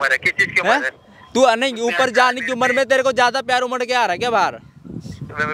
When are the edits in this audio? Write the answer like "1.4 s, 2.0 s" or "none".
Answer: none